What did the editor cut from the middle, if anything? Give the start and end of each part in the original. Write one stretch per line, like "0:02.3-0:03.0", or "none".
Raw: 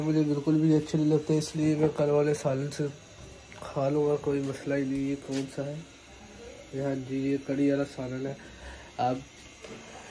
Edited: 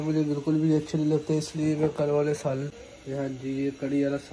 0:02.7-0:06.4

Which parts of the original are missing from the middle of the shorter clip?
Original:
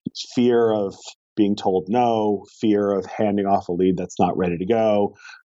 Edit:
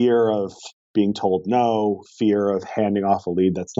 none

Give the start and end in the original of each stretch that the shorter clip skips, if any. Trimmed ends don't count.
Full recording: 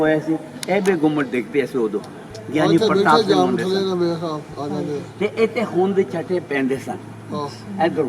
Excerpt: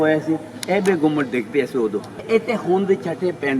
0:02.2-0:05.3

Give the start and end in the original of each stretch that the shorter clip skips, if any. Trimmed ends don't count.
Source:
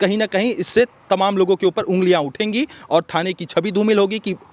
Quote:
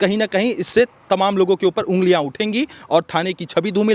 none

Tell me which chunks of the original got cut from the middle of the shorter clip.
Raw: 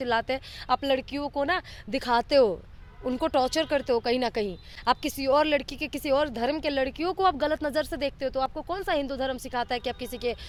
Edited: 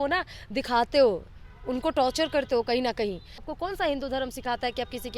0:04.8-0:08.5

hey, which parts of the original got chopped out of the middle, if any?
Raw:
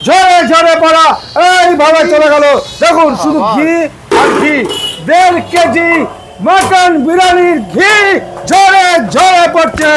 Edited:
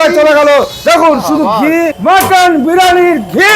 0:03.9-0:06.4

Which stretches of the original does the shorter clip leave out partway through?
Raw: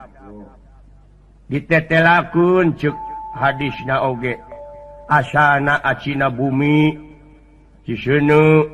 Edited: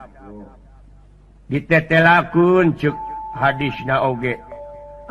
none

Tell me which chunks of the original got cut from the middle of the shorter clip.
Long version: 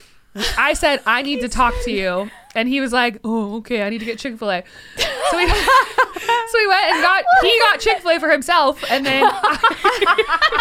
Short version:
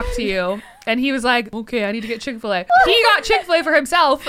0:03.2-0:03.5
0:04.6-0:07.2

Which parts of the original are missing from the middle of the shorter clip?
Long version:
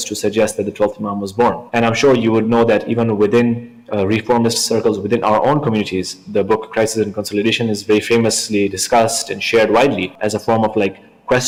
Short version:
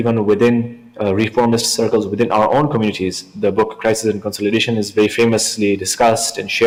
none

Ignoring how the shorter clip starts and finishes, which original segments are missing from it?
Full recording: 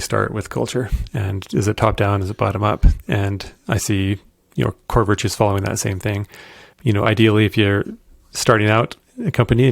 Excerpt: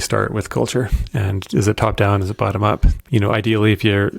0:02.9-0:06.7

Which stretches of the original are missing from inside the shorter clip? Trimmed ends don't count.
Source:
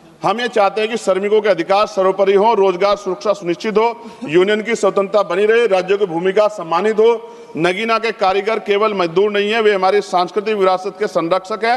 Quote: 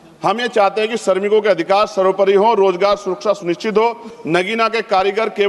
0:04.1-0:07.4

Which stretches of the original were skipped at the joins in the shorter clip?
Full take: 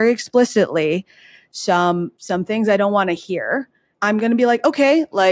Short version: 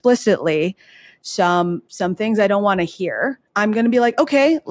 0:03.7-0:03.9

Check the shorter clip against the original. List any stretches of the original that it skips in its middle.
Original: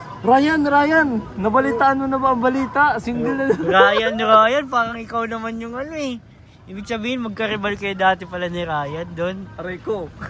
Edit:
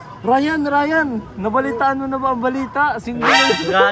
none

